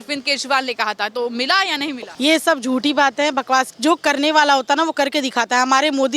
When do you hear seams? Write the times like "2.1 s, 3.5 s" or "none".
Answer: 2.0 s